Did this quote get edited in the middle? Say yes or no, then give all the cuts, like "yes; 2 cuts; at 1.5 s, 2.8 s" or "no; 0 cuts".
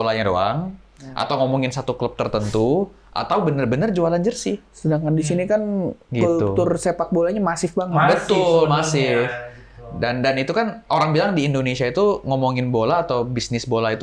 no; 0 cuts